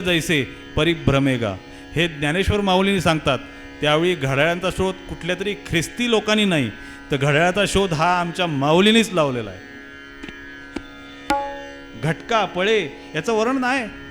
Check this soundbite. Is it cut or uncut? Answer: uncut